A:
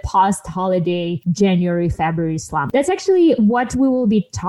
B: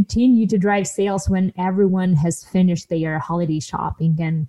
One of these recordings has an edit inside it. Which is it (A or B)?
A